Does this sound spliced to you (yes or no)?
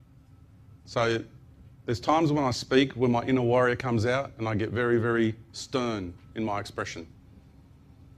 yes